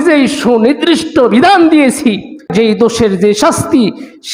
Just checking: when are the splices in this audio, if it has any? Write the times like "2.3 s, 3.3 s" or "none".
2.5 s